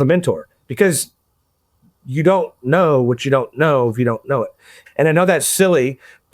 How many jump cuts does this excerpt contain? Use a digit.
1